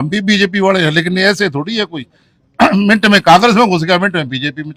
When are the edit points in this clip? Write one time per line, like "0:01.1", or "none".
none